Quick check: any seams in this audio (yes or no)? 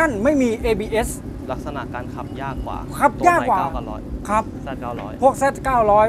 no